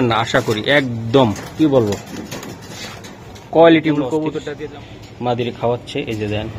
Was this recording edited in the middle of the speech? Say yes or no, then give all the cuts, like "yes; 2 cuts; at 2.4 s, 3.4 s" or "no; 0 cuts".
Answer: yes; 1 cut; at 4.4 s